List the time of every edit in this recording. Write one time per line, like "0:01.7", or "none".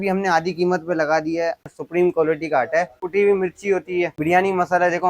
0:01.6
0:03.0
0:04.2